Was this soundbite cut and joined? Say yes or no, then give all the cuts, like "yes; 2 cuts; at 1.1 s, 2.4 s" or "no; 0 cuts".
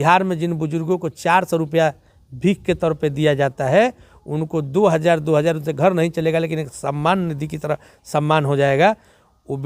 no; 0 cuts